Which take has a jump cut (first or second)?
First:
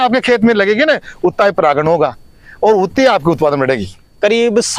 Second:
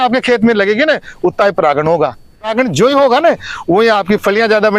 second